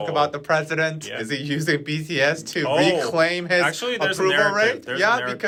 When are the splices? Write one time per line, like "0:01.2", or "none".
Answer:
none